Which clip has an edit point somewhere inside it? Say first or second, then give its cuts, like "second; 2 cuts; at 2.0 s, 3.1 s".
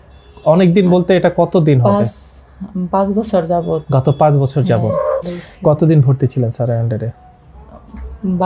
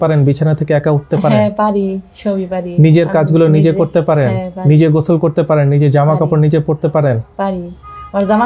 first; 1 cut; at 5.3 s